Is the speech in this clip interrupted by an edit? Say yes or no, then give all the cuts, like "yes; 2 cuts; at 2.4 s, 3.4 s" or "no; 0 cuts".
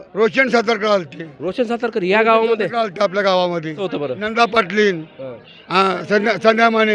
yes; 1 cut; at 3.8 s